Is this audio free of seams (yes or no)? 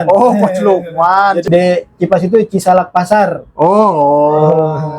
no